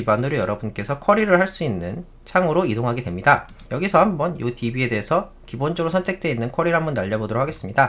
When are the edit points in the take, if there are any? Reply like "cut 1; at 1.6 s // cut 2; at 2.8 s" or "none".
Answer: cut 1; at 3.7 s